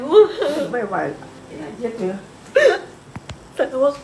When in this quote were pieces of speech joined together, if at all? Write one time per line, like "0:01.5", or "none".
0:01.4